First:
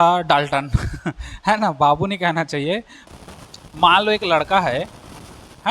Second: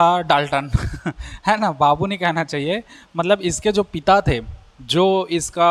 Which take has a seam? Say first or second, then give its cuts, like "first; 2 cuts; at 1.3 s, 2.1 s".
first; 1 cut; at 3.0 s